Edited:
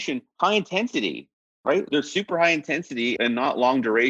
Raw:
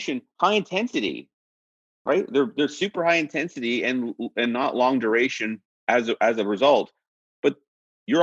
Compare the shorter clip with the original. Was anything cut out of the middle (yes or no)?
yes